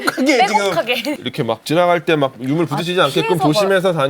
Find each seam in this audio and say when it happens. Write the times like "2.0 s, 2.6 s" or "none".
1.2 s